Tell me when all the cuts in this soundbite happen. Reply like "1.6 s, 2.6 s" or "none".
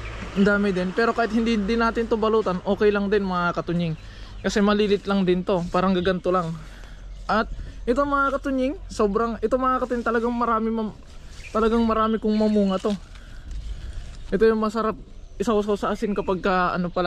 none